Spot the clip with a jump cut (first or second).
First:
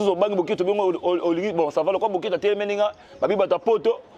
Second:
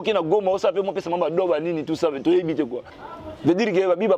second